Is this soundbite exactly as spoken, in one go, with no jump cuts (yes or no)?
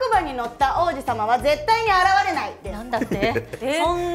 yes